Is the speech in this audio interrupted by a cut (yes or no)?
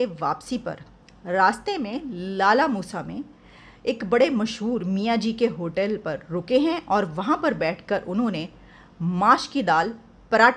no